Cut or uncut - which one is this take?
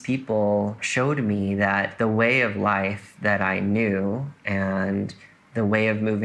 cut